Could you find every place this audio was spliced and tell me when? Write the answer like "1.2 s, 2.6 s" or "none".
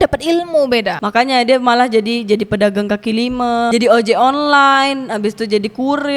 0.9 s

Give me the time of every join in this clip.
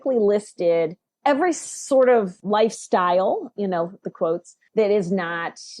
1.0 s, 2.4 s, 4.6 s

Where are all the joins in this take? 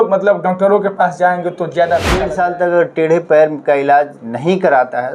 2.2 s

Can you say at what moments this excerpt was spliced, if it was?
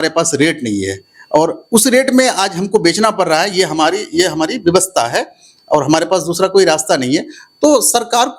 none

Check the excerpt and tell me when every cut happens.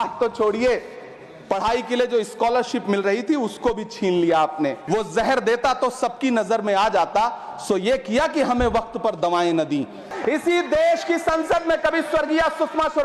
4.8 s, 10.1 s

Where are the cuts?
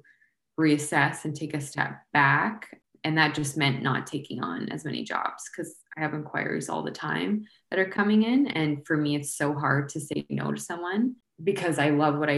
2.7 s, 11.3 s

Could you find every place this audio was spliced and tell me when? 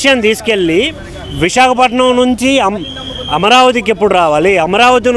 none

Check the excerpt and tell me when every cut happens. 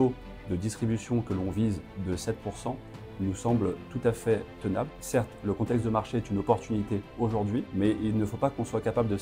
4.9 s, 7.7 s

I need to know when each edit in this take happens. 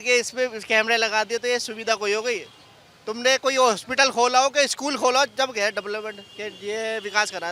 none

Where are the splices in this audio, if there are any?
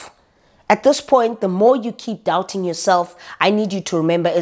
none

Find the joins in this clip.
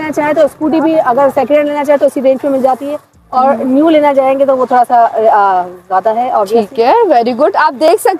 none

